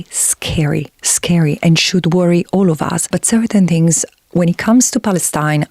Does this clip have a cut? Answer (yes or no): yes